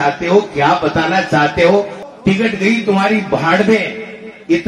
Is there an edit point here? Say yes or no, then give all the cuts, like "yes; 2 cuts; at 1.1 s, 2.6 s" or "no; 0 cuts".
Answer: yes; 1 cut; at 2.0 s